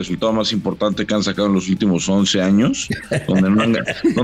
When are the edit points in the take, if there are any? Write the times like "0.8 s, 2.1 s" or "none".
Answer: none

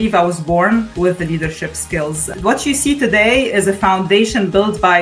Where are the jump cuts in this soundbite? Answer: 0.9 s, 2.3 s

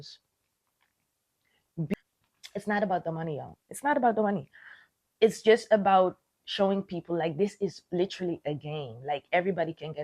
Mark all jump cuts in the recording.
1.9 s

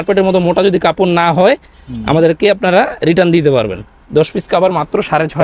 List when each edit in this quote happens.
none

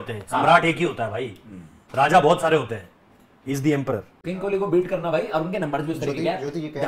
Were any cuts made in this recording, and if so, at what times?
4.1 s

